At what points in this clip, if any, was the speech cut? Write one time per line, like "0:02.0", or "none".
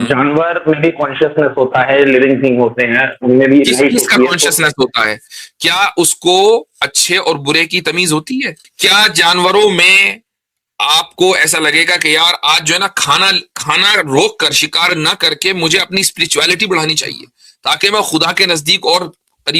0:08.6